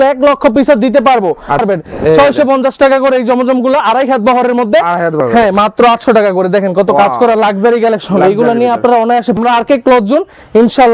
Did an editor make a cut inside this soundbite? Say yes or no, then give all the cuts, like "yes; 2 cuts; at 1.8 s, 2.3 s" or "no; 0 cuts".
yes; 3 cuts; at 1.6 s, 5.2 s, 9.4 s